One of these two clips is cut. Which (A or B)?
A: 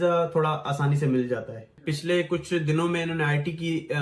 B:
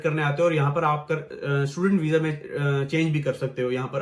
A